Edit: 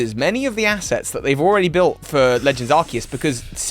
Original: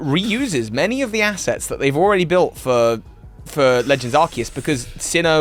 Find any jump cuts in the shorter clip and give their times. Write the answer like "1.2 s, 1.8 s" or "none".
2.0 s